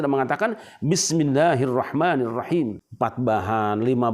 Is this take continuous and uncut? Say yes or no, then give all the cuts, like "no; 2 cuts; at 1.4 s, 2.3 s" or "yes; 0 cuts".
no; 1 cut; at 2.8 s